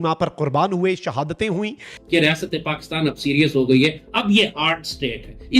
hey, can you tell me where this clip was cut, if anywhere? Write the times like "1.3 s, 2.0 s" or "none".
1.9 s